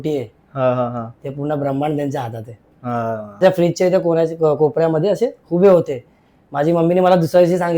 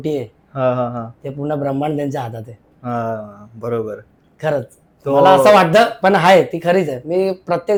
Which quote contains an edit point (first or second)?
first